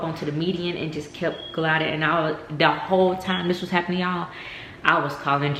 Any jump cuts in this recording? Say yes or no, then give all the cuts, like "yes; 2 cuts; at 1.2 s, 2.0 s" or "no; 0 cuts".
no; 0 cuts